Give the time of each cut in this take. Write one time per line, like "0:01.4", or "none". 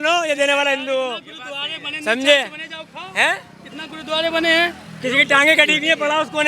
none